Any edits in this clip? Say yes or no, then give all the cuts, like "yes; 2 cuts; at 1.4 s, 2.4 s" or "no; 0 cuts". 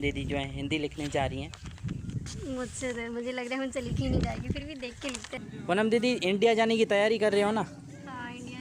yes; 1 cut; at 5.3 s